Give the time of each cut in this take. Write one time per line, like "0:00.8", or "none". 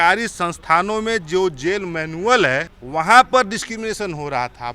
0:02.8

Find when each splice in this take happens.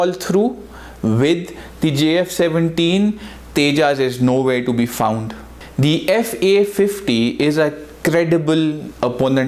none

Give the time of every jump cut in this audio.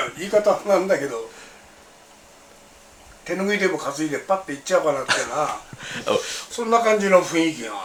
none

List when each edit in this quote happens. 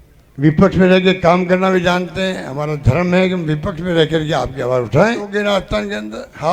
0:05.3

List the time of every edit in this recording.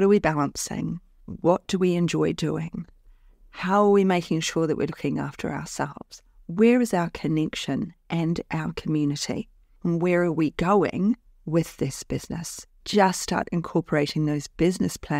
0:12.8

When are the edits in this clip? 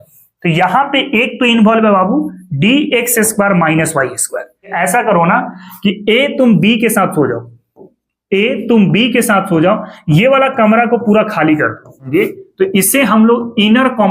0:04.7
0:12.0

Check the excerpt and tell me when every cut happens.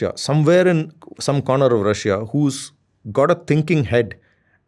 none

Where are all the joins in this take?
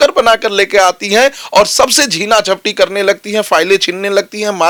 none

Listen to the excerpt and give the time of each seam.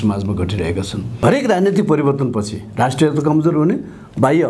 0:01.0

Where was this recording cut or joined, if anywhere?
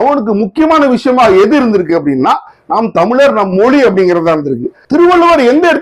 0:04.7

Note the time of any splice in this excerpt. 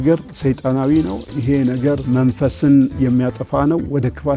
0:02.0

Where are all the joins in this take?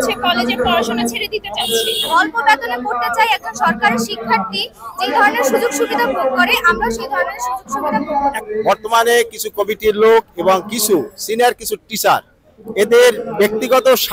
0:02.1
0:08.4

